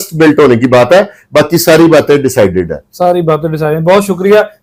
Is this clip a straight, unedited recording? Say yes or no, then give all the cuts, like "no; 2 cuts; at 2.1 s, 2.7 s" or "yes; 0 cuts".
yes; 0 cuts